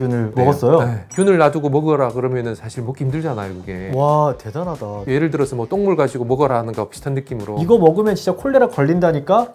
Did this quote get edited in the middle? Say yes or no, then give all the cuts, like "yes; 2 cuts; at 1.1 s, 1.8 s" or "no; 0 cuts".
yes; 1 cut; at 1.0 s